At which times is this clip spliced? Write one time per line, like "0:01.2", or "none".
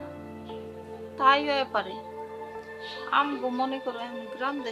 0:01.2